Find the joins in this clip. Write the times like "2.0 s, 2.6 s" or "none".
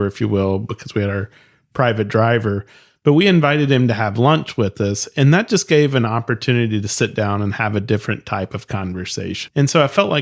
none